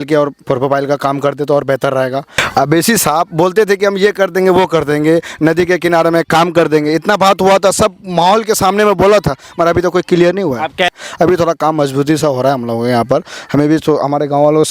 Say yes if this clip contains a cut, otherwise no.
yes